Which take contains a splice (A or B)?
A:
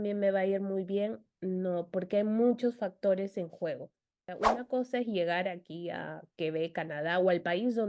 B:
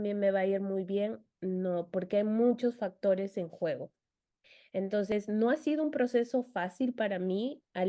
A